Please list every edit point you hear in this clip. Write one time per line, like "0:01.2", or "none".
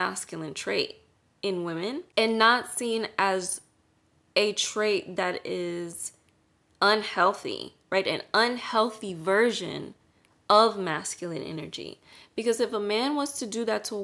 0:02.1